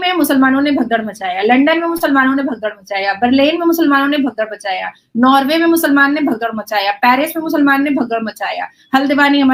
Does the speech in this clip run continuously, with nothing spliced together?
yes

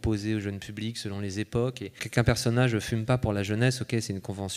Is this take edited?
yes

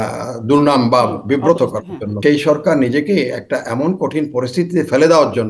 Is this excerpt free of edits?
no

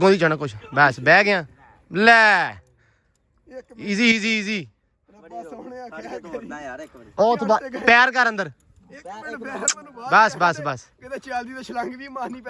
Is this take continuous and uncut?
yes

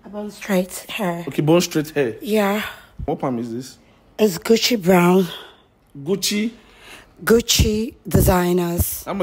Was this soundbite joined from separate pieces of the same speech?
yes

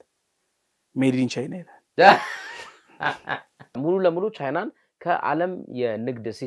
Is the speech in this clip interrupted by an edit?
yes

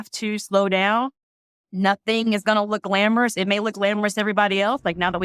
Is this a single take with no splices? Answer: yes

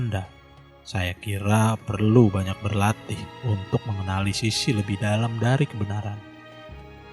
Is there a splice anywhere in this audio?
yes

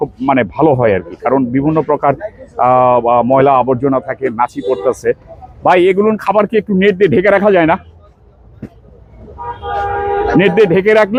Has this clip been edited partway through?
no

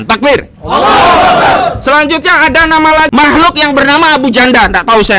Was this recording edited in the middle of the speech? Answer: yes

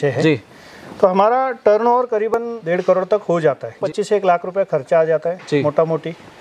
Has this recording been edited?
yes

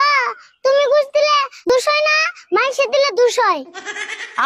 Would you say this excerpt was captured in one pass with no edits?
no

